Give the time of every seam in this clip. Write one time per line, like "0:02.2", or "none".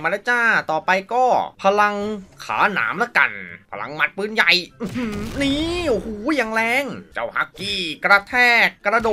0:03.6
0:07.0